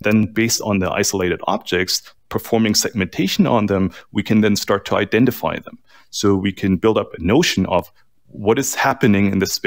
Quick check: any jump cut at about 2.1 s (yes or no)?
no